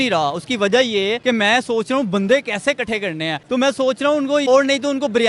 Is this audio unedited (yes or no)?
no